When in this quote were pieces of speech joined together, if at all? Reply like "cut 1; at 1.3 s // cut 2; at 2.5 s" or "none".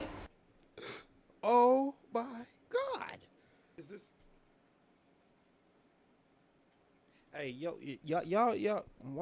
cut 1; at 3.8 s